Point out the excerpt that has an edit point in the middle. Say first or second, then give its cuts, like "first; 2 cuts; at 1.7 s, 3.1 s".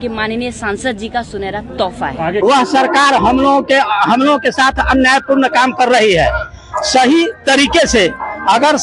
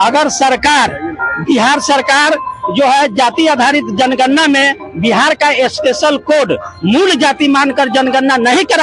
first; 1 cut; at 2.4 s